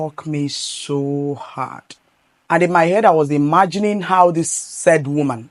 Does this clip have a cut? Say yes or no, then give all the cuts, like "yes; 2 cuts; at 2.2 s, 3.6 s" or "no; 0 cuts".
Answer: no; 0 cuts